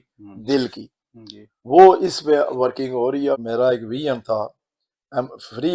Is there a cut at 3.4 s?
yes; 1 cut; at 3.4 s

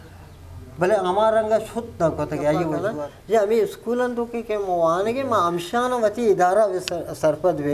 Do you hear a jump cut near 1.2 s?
no; 1 cut; at 2.8 s

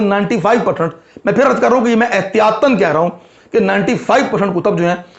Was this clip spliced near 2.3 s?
no; 0 cuts

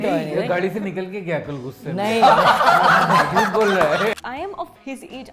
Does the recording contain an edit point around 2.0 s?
no; 1 cut; at 4.1 s

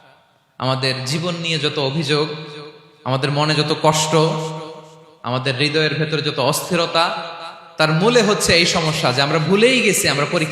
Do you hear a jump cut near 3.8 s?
no; 0 cuts

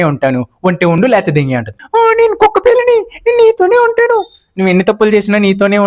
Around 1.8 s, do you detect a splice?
yes; 1 cut; at 1.8 s

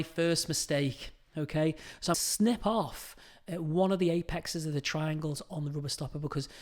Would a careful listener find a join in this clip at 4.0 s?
no; 1 cut; at 2.1 s

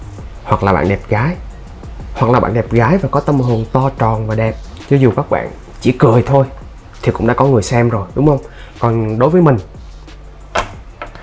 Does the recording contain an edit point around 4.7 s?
yes; 1 cut; at 4.7 s

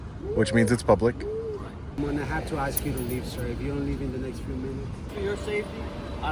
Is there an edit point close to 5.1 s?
yes; 2 cuts; at 1.9 s, 5.1 s

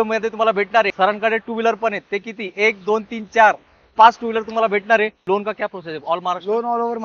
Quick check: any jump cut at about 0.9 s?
yes; 2 cuts; at 0.9 s, 5.2 s

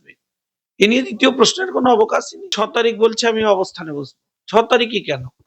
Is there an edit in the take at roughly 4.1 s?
no; 1 cut; at 2.5 s

